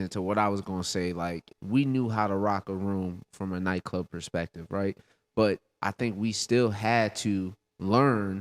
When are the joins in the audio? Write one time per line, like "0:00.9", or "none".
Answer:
0:01.5